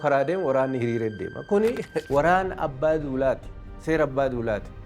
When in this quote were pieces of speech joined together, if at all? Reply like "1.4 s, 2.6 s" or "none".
2.0 s